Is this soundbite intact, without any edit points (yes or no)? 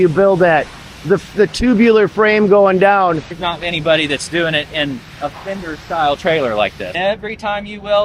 no